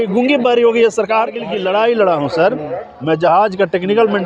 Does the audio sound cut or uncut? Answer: cut